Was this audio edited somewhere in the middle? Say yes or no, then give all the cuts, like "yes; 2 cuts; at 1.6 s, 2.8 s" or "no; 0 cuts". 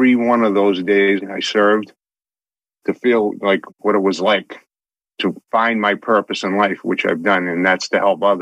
yes; 2 cuts; at 1.2 s, 5.2 s